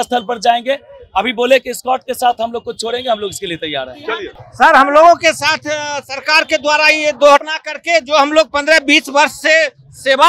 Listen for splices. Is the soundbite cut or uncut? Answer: cut